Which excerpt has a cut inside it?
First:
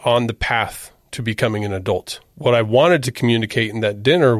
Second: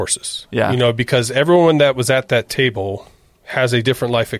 first; 1 cut; at 2.2 s

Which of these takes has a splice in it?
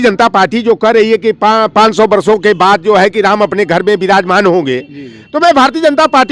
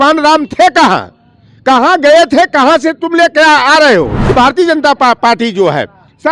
second; 1 cut; at 4.3 s

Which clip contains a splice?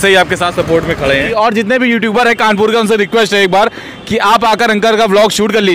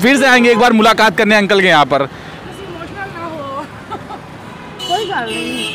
first; 1 cut; at 1.3 s

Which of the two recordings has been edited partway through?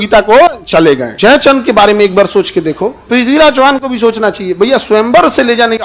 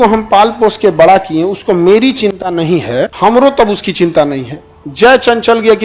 first; 2 cuts; at 1.1 s, 2.9 s

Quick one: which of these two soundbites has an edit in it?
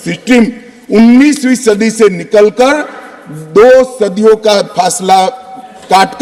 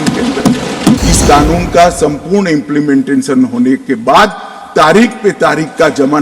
second; 1 cut; at 1.0 s

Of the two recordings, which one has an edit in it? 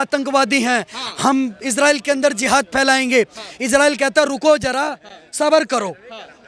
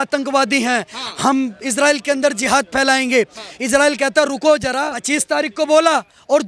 second; 1 cut; at 5.0 s

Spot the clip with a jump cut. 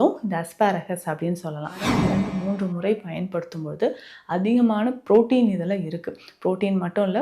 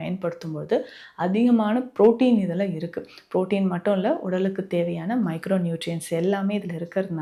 first; 1 cut; at 1.8 s

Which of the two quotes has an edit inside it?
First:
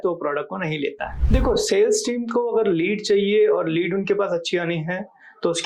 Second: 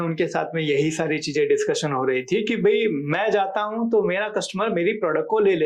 first; 1 cut; at 1.1 s

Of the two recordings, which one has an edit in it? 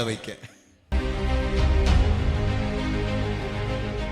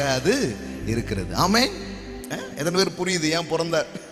first; 1 cut; at 0.9 s

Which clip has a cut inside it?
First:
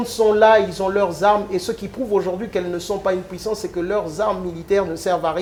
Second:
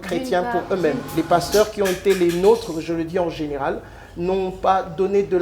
second; 1 cut; at 1.0 s

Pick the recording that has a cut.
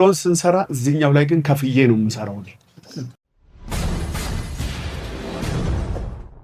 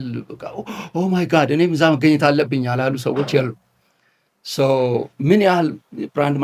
first; 1 cut; at 3.2 s

